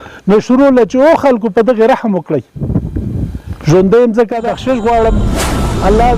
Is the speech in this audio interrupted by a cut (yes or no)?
yes